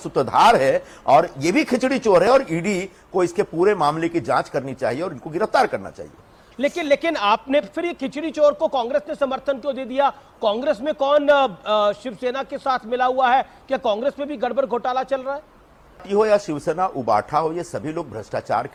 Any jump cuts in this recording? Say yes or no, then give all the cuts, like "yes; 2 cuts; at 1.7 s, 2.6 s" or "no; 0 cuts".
no; 0 cuts